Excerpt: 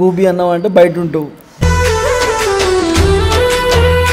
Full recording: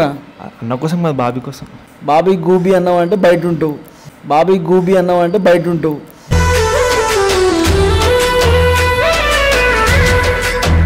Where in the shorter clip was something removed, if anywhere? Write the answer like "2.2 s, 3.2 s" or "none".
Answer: 1.4 s